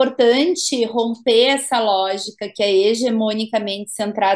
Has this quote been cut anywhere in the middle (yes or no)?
no